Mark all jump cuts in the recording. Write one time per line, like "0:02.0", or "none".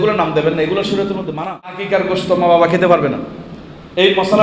0:01.8